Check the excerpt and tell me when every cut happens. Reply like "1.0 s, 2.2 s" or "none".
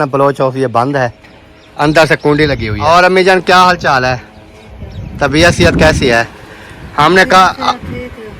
2.9 s